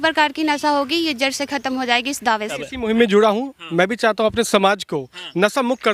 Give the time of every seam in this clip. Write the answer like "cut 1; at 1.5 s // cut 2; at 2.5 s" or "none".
none